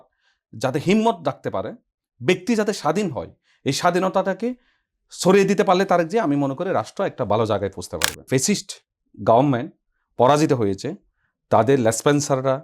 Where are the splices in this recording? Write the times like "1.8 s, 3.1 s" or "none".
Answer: 8.3 s